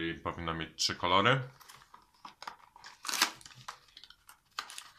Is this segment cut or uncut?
uncut